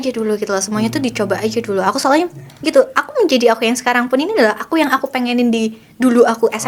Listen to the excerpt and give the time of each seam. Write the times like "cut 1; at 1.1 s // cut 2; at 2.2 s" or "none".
none